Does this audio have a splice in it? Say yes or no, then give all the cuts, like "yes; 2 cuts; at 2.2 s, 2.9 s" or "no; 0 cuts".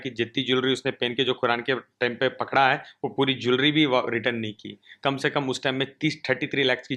no; 0 cuts